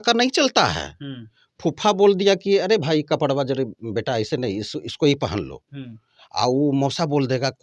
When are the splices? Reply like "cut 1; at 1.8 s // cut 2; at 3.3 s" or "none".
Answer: none